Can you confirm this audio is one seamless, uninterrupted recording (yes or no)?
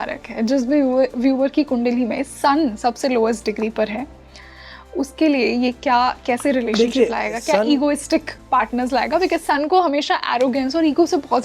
yes